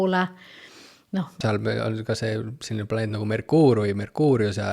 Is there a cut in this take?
yes; 1 cut; at 1.4 s

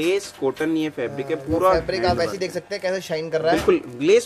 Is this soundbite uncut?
yes; 0 cuts

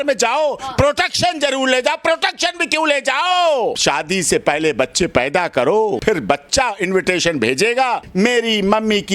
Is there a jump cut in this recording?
yes; 3 cuts; at 3.8 s, 6.0 s, 8.0 s

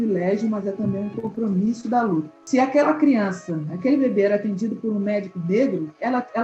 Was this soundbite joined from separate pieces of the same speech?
yes; 1 cut; at 2.3 s

